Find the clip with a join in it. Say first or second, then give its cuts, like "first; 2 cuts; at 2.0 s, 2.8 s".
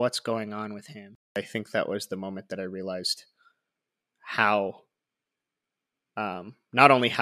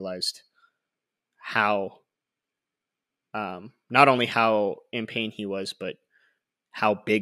first; 1 cut; at 1.3 s